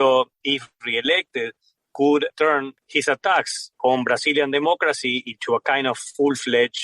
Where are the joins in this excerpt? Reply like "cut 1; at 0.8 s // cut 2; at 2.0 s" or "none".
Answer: none